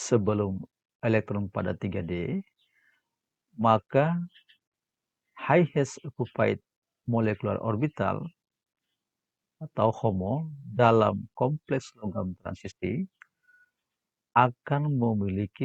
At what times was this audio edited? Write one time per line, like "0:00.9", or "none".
none